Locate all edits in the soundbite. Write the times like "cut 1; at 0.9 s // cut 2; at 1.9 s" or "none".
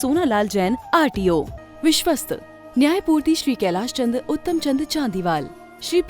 cut 1; at 1.6 s